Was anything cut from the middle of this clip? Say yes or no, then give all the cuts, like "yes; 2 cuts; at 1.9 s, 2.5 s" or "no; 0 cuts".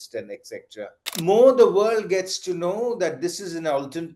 yes; 1 cut; at 1.0 s